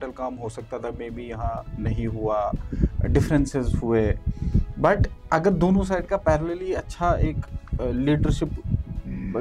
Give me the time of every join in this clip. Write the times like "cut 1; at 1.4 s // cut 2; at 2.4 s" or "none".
none